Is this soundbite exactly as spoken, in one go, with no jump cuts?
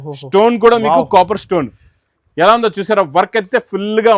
yes; 0 cuts

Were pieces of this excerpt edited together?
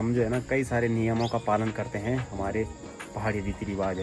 no; 0 cuts

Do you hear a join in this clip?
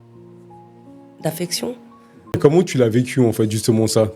yes; 1 cut; at 2.3 s

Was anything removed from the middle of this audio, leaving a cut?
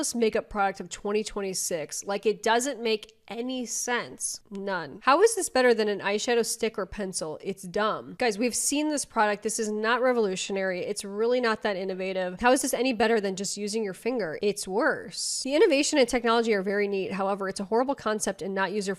no; 0 cuts

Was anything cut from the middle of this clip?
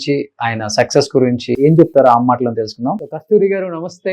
yes; 1 cut; at 1.6 s

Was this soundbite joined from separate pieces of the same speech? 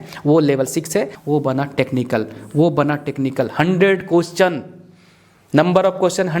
yes; 1 cut; at 1.2 s

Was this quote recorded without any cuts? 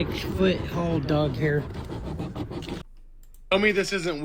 no; 1 cut; at 2.9 s

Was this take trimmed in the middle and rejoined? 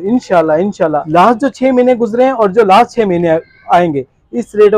yes; 1 cut; at 1.0 s

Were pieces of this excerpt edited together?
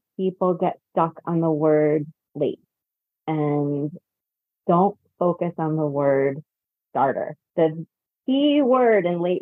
yes; 1 cut; at 7.4 s

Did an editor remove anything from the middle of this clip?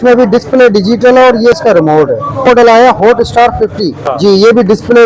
yes; 2 cuts; at 2.5 s, 4.1 s

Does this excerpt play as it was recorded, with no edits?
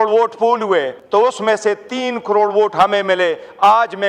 no; 1 cut; at 1.0 s

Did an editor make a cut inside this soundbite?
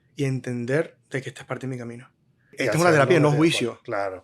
yes; 1 cut; at 2.6 s

